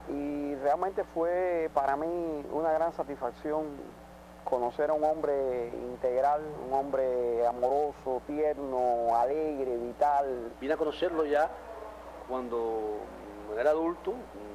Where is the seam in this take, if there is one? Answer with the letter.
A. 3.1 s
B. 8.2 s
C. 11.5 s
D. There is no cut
A